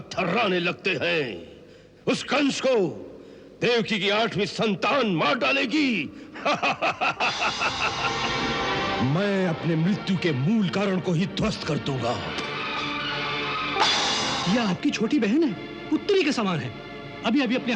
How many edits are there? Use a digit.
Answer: 3